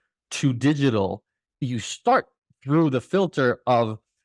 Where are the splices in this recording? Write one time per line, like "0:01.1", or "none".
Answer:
0:01.5

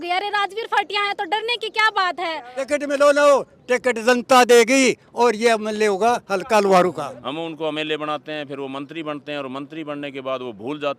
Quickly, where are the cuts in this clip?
0:02.5
0:07.2

